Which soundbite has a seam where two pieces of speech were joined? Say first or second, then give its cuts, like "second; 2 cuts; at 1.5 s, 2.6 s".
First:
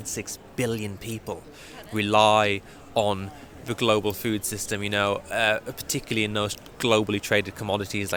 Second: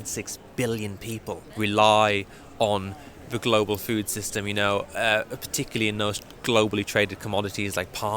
second; 1 cut; at 1.5 s